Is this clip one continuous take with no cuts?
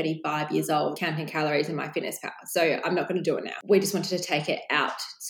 no; 2 cuts; at 1.0 s, 3.6 s

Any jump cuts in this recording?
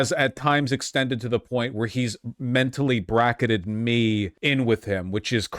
yes; 1 cut; at 4.3 s

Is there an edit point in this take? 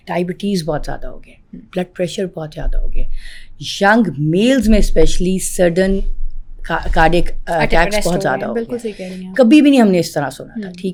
no; 0 cuts

